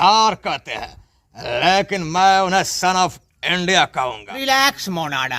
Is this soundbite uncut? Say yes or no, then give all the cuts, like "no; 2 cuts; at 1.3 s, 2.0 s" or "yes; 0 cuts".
no; 1 cut; at 4.3 s